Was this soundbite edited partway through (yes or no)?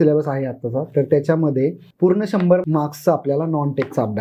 yes